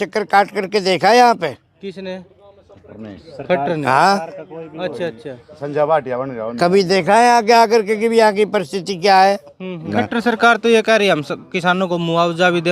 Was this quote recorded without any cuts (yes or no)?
no